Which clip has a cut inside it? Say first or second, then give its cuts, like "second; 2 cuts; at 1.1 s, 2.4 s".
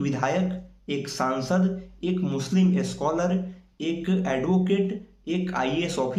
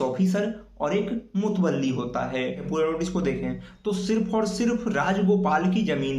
second; 1 cut; at 2.6 s